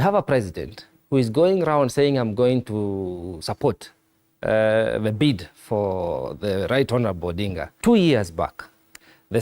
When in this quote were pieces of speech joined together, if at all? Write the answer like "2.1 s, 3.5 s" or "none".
7.6 s